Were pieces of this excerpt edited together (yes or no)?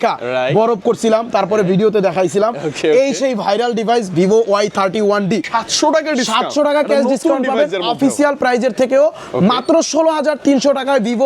yes